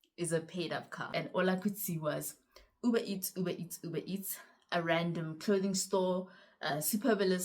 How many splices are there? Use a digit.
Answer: 1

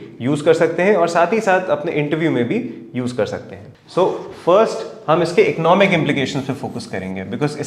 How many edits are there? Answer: 0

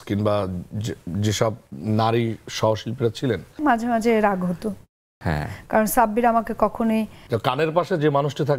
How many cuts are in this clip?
2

